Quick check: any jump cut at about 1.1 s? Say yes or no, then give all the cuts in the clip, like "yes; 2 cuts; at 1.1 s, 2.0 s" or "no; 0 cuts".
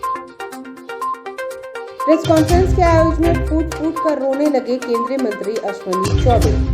yes; 1 cut; at 1.1 s